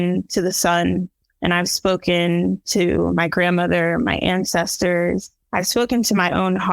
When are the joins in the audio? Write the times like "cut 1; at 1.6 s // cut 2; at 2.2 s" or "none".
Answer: cut 1; at 1.2 s // cut 2; at 5.4 s